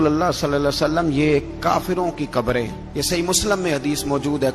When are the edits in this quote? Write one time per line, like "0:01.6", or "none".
none